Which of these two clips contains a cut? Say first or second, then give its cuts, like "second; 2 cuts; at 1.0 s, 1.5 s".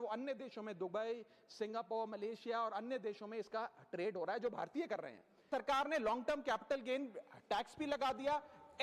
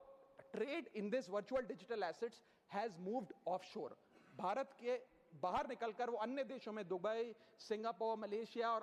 first; 1 cut; at 5.4 s